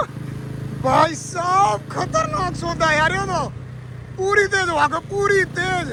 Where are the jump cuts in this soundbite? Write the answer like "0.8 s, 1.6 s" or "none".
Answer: none

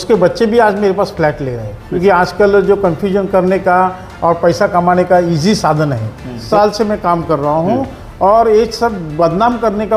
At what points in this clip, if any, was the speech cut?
2.0 s, 6.4 s

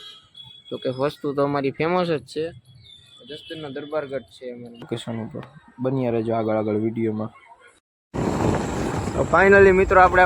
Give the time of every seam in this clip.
4.9 s

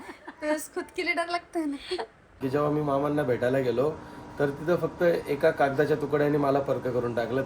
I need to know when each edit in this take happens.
2.4 s

